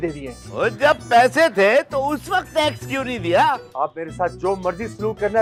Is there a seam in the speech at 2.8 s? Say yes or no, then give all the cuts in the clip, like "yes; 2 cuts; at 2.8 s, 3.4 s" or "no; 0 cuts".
no; 0 cuts